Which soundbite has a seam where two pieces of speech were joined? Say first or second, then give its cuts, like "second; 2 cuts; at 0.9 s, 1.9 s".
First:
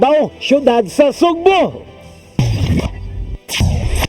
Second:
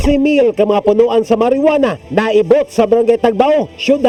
first; 1 cut; at 1.8 s